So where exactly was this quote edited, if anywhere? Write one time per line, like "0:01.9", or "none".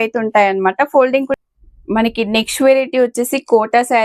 0:01.3